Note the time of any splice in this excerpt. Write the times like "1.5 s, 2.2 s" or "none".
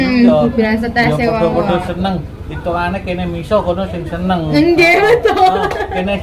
none